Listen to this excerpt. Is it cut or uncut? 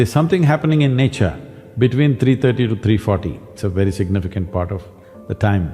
cut